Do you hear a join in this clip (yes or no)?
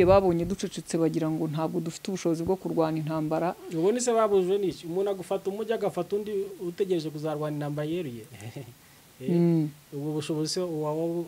no